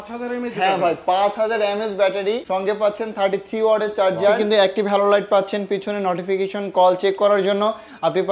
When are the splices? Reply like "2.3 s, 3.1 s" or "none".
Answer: 4.4 s